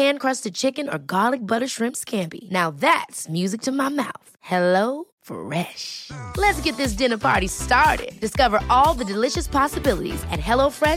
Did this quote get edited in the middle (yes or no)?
no